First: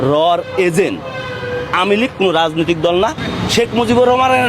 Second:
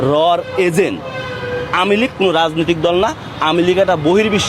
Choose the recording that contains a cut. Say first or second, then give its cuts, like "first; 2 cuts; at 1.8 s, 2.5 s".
first; 1 cut; at 3.2 s